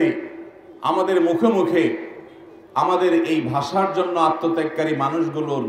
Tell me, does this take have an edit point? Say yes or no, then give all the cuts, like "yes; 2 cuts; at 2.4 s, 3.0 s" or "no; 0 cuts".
no; 0 cuts